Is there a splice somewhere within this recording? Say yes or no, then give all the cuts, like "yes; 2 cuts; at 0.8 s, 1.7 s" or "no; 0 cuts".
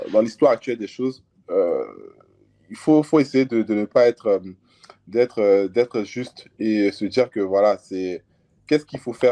no; 0 cuts